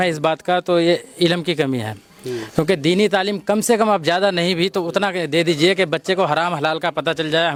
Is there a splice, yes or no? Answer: no